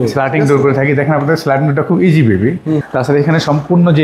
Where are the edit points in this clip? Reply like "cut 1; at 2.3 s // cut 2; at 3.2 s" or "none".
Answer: cut 1; at 2.8 s